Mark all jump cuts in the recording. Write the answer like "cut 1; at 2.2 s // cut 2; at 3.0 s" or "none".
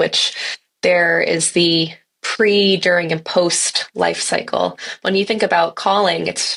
none